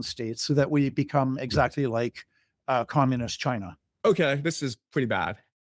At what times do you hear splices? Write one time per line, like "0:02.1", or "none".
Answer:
0:03.8